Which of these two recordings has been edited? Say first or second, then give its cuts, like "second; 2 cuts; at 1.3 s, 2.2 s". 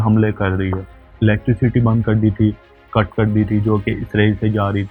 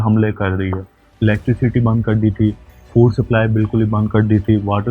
second; 1 cut; at 2.7 s